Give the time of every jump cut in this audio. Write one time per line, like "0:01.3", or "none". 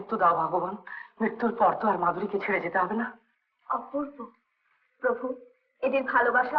none